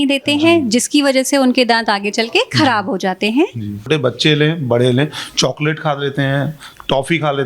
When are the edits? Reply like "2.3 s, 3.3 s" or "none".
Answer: 3.9 s